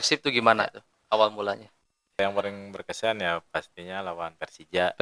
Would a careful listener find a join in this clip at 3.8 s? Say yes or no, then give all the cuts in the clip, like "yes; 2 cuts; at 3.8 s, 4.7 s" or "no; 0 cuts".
no; 1 cut; at 2.2 s